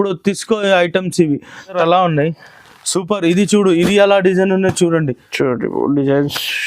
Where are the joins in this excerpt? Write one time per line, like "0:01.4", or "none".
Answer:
0:01.7